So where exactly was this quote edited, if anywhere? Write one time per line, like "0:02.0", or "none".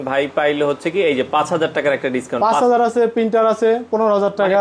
none